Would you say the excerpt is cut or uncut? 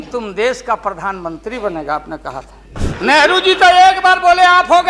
cut